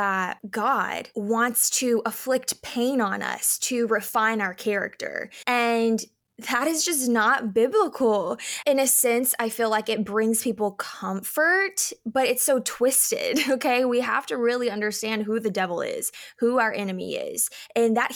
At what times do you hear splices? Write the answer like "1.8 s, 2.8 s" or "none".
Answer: 8.6 s

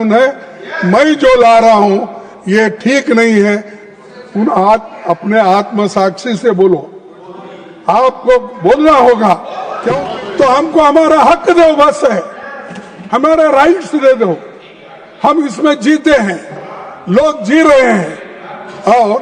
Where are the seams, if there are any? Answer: 9.9 s

